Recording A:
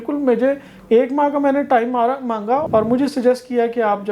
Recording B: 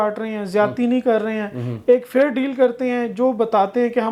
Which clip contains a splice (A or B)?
A